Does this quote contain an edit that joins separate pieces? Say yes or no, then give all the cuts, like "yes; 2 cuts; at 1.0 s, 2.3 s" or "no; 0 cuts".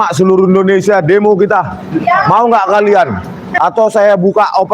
yes; 1 cut; at 3.4 s